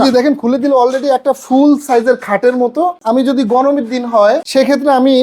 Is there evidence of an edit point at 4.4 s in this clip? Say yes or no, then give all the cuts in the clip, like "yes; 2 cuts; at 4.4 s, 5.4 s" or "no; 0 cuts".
yes; 2 cuts; at 3.0 s, 4.4 s